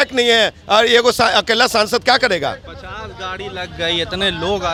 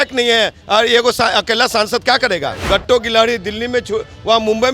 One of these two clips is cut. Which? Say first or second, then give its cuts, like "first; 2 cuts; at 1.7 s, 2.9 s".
second; 1 cut; at 2.6 s